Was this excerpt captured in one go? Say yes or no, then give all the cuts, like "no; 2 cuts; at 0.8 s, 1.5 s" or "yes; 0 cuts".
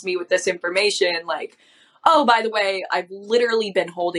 yes; 0 cuts